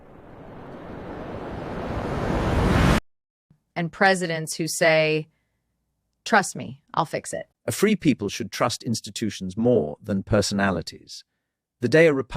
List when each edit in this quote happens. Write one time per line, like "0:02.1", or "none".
0:03.0